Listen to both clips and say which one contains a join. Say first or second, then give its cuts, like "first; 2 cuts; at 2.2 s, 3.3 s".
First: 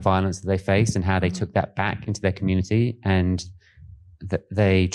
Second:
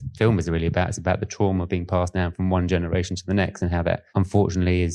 second; 1 cut; at 4.1 s